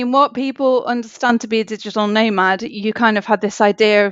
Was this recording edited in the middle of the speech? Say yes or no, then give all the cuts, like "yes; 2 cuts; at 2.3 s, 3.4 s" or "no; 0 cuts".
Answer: no; 0 cuts